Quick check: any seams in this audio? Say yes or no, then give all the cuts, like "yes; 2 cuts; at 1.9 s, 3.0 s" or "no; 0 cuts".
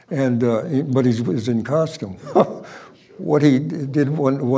yes; 1 cut; at 2.2 s